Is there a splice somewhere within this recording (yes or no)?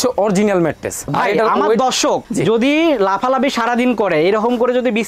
yes